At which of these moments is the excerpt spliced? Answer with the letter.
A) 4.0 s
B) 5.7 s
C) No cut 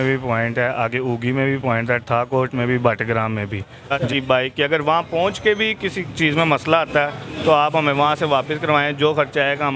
A